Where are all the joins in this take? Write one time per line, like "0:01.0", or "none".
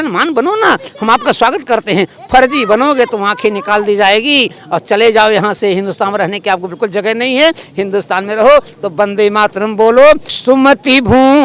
0:10.4